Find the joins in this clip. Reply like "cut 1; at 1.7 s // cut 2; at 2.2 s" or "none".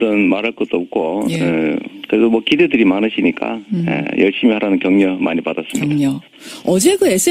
cut 1; at 1.6 s